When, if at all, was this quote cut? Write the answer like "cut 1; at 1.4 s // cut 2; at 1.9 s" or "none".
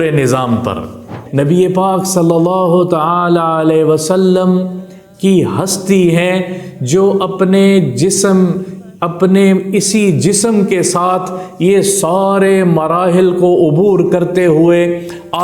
cut 1; at 1.2 s